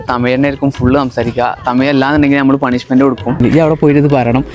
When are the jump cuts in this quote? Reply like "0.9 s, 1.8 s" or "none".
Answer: 3.4 s